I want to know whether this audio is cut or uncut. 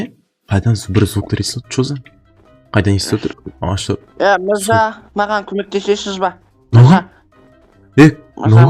uncut